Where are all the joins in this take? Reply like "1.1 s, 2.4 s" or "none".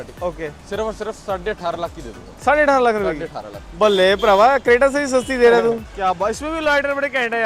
5.9 s